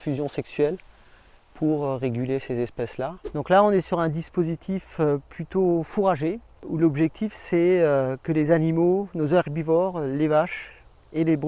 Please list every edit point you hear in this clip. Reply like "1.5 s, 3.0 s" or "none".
3.2 s, 6.6 s

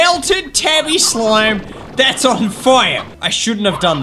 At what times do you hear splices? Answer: 3.0 s

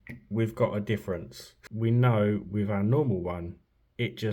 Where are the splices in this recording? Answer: 1.6 s

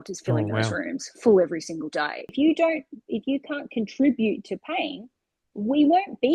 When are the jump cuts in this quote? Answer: 2.3 s

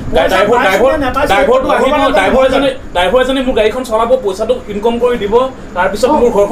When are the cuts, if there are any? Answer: none

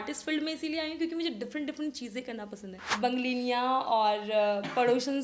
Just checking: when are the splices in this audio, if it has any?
2.8 s

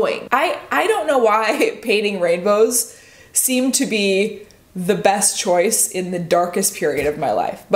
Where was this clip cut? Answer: none

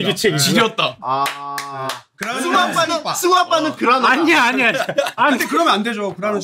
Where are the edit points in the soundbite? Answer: 1.0 s, 2.1 s, 5.2 s

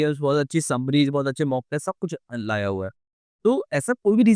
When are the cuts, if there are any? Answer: none

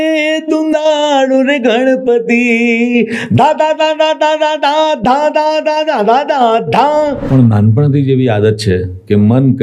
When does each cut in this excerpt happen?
7.2 s

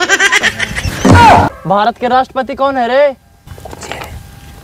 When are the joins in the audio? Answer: 1.6 s, 3.4 s

